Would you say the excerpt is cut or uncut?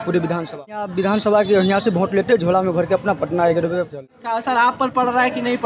cut